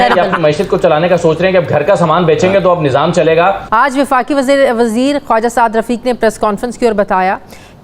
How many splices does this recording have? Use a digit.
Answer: 1